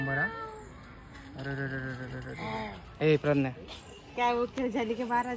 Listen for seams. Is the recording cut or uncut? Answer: uncut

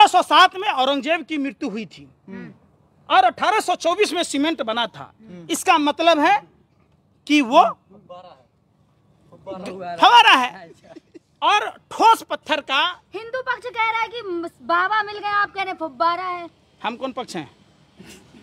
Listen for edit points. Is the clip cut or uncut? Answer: uncut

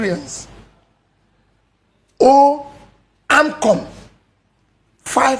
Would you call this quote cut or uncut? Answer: uncut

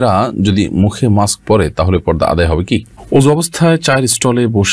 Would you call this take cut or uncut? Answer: cut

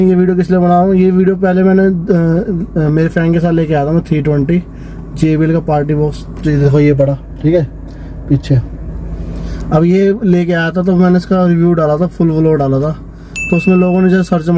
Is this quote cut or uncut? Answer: uncut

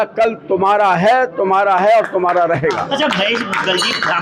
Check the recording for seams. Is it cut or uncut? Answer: uncut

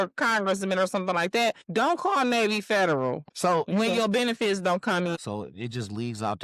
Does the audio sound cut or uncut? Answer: cut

